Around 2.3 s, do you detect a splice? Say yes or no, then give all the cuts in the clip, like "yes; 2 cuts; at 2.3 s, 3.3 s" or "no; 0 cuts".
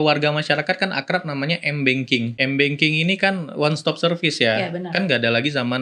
yes; 1 cut; at 2.3 s